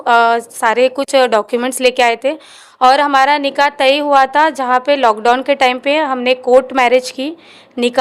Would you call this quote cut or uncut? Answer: uncut